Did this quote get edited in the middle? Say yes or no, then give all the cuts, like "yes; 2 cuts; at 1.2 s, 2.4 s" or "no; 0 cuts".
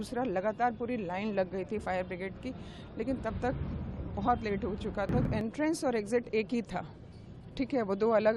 yes; 1 cut; at 5.3 s